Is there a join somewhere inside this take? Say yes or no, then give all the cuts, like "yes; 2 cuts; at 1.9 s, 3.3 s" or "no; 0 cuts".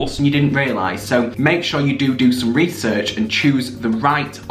no; 0 cuts